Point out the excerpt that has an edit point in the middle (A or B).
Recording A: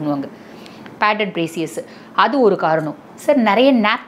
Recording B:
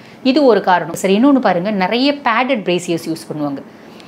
B